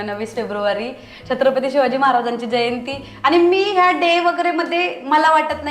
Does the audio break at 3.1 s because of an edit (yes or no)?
no